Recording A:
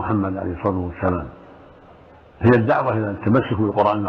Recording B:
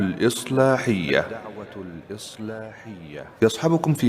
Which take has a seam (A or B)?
B